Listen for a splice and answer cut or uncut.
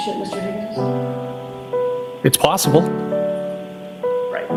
uncut